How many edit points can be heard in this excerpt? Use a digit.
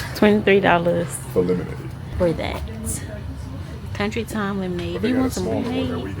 1